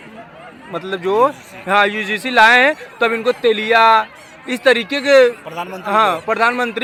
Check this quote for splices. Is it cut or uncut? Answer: uncut